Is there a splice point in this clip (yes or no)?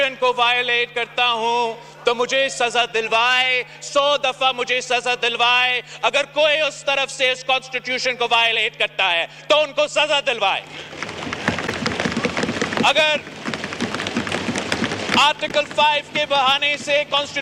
no